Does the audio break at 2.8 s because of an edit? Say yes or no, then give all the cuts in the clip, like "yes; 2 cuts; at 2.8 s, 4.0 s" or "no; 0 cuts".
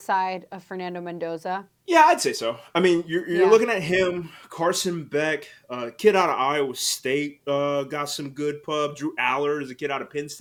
no; 0 cuts